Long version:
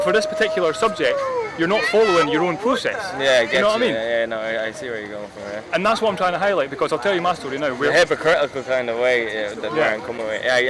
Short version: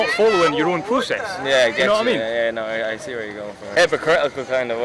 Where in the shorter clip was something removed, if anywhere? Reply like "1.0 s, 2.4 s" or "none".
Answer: 3.7 s